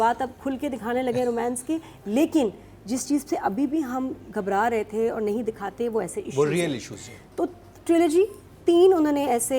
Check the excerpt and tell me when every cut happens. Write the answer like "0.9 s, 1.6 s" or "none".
none